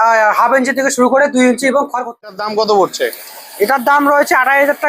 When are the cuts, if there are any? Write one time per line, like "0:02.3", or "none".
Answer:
0:02.2